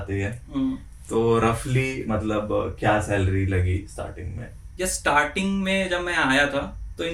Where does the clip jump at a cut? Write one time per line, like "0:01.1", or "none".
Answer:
none